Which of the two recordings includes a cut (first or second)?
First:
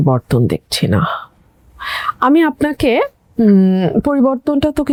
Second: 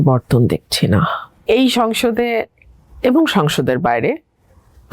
second